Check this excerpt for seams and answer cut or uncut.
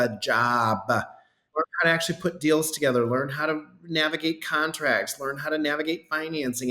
cut